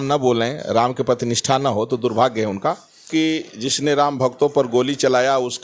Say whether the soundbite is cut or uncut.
cut